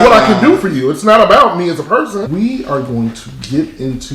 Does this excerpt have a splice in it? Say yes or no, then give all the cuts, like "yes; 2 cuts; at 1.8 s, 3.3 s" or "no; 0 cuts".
yes; 1 cut; at 2.3 s